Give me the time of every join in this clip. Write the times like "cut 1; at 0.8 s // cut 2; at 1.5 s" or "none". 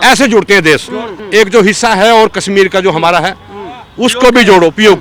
cut 1; at 1.1 s